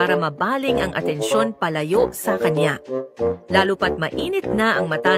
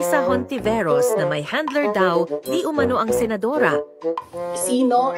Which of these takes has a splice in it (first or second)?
first